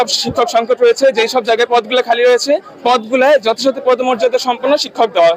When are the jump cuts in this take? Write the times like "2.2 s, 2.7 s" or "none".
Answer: none